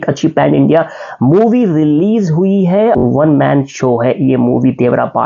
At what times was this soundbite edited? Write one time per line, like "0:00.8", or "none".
0:03.0

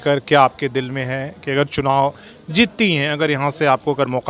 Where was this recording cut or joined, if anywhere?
none

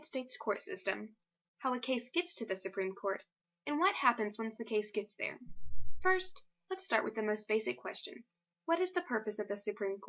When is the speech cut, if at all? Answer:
0:08.6

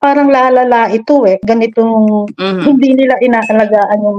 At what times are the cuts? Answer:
0:01.4

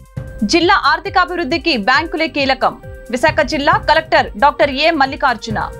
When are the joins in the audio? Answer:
none

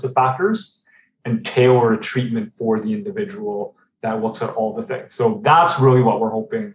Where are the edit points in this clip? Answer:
none

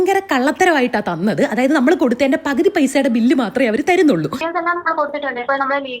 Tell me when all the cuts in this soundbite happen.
0:04.4

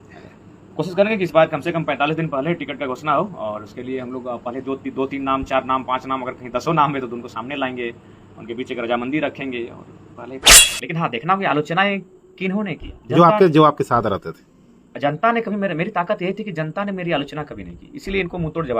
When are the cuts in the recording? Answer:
0:10.6

